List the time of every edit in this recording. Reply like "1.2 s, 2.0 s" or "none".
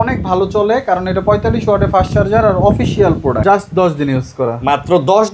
3.4 s